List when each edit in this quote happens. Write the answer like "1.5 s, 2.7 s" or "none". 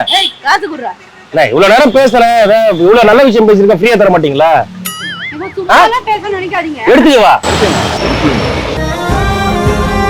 none